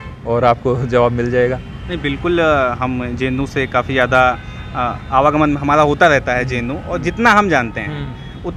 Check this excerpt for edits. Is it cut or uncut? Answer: uncut